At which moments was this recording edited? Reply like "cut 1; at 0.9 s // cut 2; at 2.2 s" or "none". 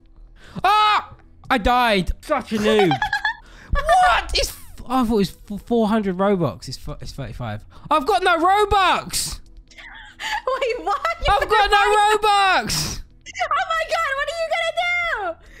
cut 1; at 2.2 s

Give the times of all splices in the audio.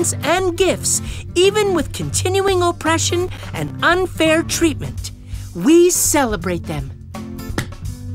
cut 1; at 7.0 s

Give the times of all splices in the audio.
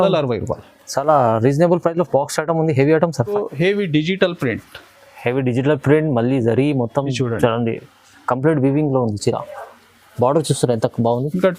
cut 1; at 3.3 s

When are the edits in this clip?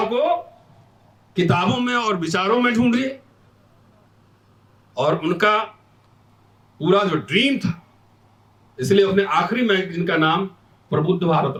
none

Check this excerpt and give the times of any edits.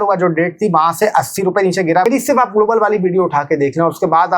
cut 1; at 2.1 s

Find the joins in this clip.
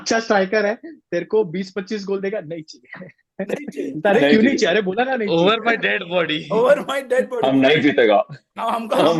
none

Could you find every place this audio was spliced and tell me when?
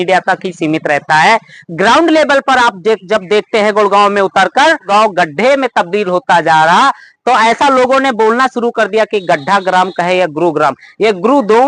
cut 1; at 4.9 s

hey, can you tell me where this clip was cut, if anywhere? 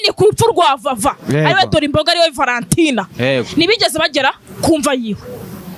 none

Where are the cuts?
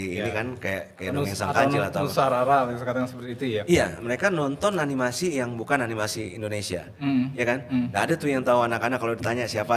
none

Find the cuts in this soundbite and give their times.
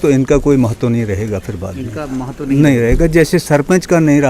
none

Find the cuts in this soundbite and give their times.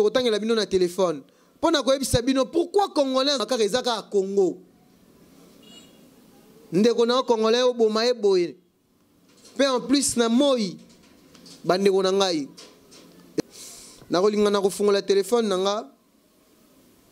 cut 1; at 3.4 s // cut 2; at 13.4 s

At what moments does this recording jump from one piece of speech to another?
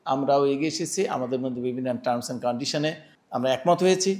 cut 1; at 3.1 s

